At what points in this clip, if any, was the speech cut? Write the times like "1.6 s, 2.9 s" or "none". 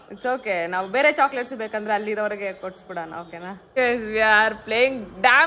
3.8 s